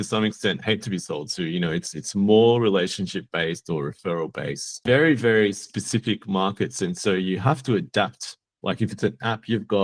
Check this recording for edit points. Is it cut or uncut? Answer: cut